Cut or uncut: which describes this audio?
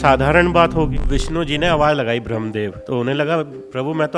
cut